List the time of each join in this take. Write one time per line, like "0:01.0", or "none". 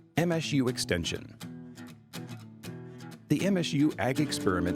0:01.4
0:03.1